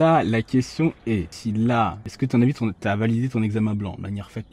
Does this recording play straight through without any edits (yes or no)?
no